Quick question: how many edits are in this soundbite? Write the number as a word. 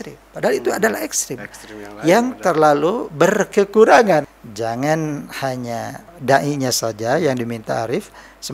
two